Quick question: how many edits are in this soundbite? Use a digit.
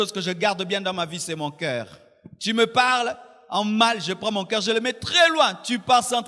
0